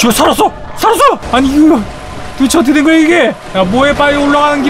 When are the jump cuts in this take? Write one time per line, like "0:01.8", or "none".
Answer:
0:01.2
0:03.4

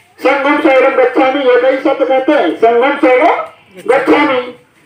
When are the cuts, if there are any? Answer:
none

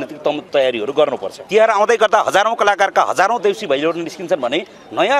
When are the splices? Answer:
0:01.3

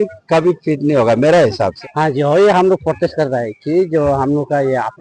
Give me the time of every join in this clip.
0:01.8

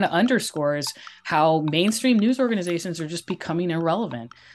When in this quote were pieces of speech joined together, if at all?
none

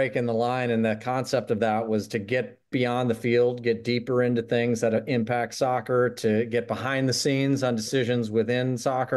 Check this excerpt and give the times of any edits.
none

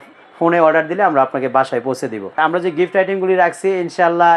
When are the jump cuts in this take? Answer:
0:02.4

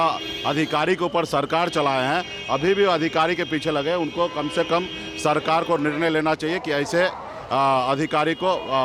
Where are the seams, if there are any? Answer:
none

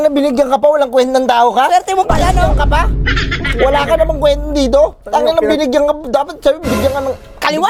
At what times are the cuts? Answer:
none

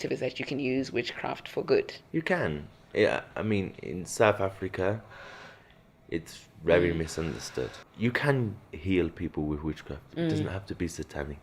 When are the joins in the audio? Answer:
0:02.0
0:07.8

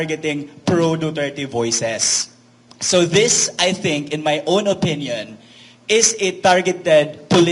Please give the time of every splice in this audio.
none

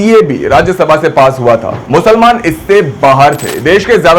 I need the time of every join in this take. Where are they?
0:01.7

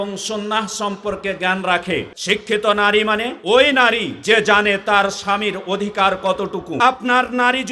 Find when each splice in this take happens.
0:02.1
0:03.3
0:04.1
0:06.7

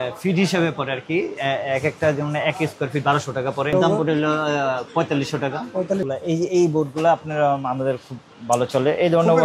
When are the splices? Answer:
0:03.7
0:06.1

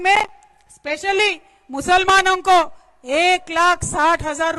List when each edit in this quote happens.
none

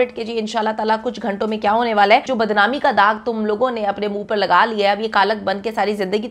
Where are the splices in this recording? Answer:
0:02.3

